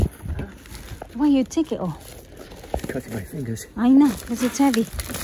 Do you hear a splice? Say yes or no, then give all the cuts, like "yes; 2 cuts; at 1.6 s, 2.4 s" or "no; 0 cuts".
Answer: no; 0 cuts